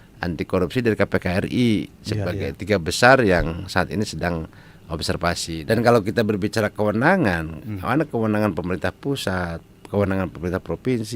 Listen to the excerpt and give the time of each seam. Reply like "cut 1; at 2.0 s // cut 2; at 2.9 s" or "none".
cut 1; at 5.6 s